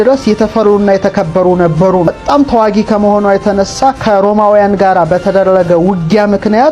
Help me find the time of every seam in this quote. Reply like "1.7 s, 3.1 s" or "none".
2.1 s